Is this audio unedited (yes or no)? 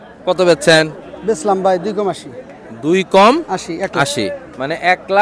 yes